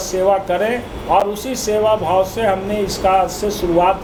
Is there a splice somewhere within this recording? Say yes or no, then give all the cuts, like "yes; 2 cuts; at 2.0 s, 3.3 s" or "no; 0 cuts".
no; 0 cuts